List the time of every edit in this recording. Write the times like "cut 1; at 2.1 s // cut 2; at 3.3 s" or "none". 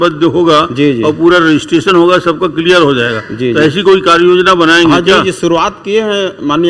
none